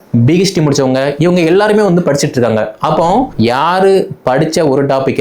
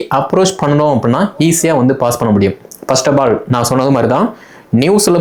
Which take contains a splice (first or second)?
first